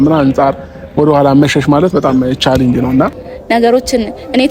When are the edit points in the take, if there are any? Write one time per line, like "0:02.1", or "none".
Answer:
0:03.3